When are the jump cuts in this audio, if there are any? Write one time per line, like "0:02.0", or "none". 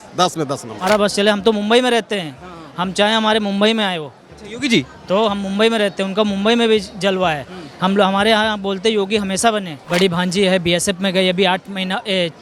0:00.9
0:09.8